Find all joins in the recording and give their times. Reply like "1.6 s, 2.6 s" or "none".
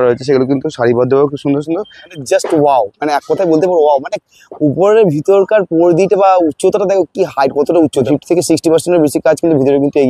2.0 s, 8.1 s